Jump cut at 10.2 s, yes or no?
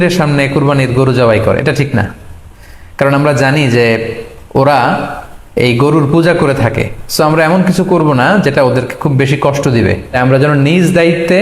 yes